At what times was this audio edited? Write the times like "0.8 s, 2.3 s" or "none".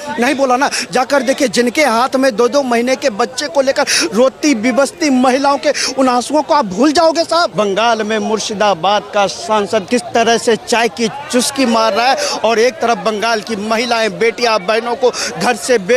7.5 s, 9.9 s